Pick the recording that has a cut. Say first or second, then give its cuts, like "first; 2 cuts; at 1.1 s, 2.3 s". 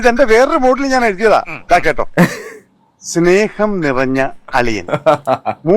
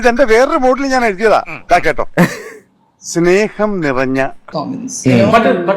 second; 1 cut; at 4.5 s